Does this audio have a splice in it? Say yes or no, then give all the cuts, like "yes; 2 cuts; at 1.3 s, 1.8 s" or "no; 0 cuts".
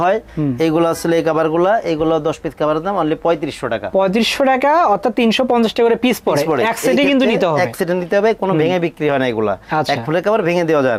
no; 0 cuts